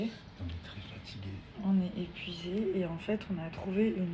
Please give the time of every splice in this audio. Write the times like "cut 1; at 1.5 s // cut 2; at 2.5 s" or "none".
none

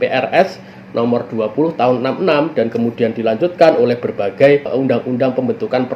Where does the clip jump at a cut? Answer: cut 1; at 4.7 s

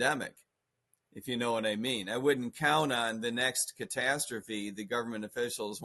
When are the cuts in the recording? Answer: none

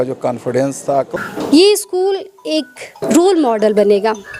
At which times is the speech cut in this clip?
cut 1; at 1.1 s // cut 2; at 3.0 s

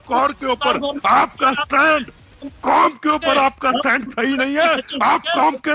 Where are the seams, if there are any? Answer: none

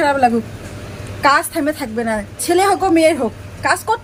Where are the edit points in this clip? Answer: none

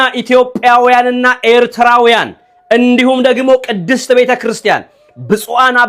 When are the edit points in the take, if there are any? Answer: none

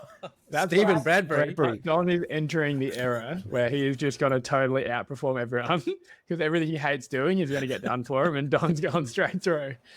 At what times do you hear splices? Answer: cut 1; at 6.8 s

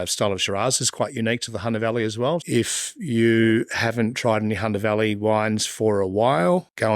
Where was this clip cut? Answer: cut 1; at 2.4 s

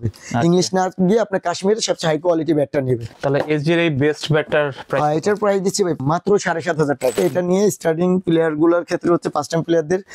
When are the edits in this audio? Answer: cut 1; at 3.1 s // cut 2; at 6.0 s // cut 3; at 7.2 s

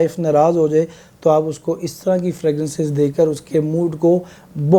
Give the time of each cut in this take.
none

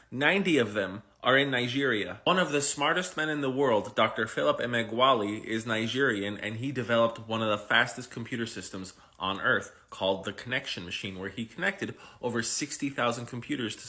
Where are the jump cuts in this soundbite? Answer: none

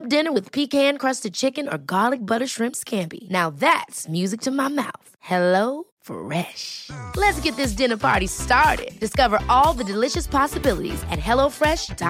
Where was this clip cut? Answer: none

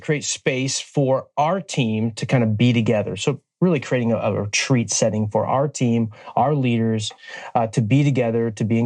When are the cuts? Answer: none

